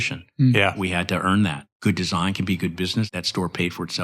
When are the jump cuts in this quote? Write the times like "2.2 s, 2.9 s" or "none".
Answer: 1.7 s, 3.1 s